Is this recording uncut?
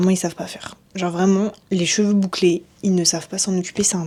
yes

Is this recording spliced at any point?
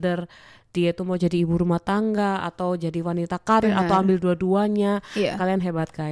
no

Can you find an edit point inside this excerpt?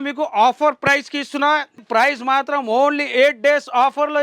yes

